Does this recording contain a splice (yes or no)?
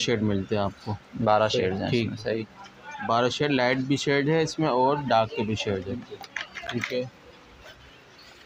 no